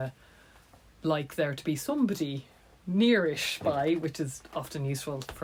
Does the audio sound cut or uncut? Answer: uncut